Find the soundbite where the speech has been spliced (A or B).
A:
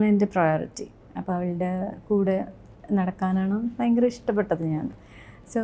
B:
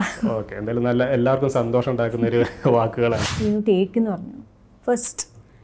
B